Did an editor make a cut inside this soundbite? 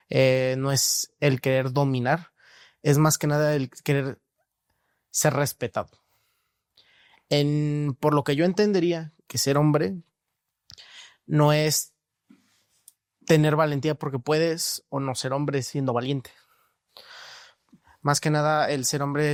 no; 0 cuts

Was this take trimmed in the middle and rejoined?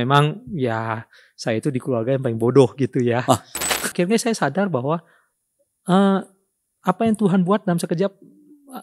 yes; 1 cut; at 3.9 s

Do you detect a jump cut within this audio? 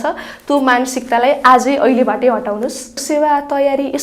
yes; 1 cut; at 3.0 s

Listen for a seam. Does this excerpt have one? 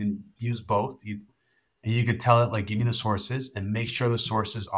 yes; 1 cut; at 1.3 s

